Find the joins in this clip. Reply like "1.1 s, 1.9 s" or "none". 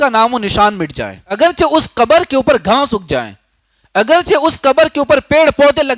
1.4 s